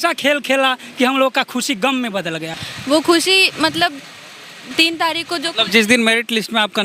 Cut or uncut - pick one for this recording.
cut